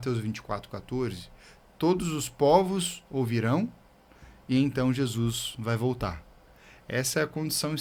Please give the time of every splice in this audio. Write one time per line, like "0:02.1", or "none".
none

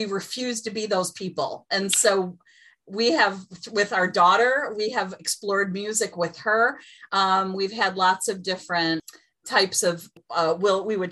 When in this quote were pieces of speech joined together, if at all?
0:09.1
0:10.1

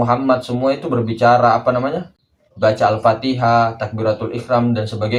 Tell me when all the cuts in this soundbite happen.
none

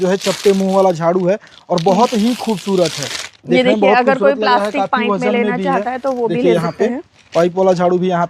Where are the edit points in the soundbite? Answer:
none

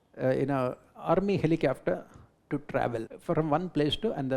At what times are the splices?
0:03.1

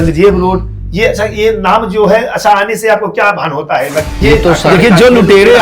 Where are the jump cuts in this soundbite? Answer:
0:04.1

